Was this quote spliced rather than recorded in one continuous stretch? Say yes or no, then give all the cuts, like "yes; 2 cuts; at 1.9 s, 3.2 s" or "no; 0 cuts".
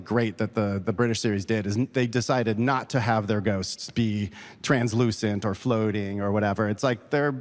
no; 0 cuts